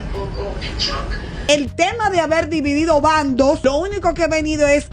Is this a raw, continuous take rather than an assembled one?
no; 1 cut; at 1.4 s

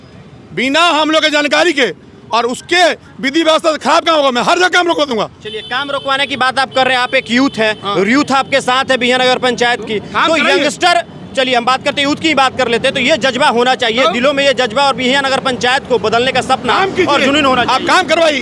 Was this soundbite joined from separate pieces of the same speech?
no; 0 cuts

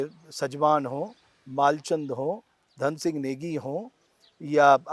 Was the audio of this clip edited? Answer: no; 0 cuts

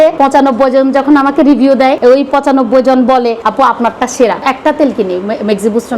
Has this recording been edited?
yes; 1 cut; at 4.4 s

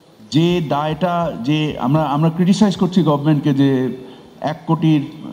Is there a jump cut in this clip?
no; 0 cuts

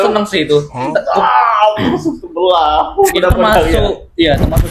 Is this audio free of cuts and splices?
yes; 0 cuts

